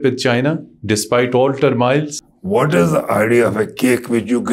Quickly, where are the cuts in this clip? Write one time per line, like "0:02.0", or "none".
0:02.2